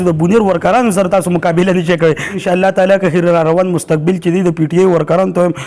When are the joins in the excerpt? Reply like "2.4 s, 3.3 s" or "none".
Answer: 2.4 s